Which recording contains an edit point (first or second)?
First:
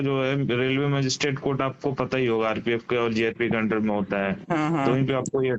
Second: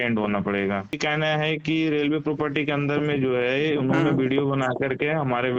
second